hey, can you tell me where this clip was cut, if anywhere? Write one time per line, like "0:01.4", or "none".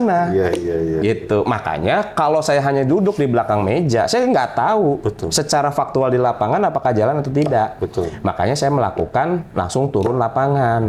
none